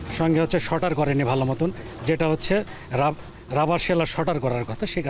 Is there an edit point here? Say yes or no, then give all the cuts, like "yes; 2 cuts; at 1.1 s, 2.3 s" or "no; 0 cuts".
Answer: no; 0 cuts